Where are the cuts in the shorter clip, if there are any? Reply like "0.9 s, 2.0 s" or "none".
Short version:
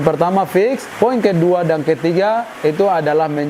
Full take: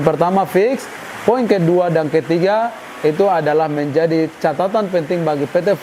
0.9 s, 2.5 s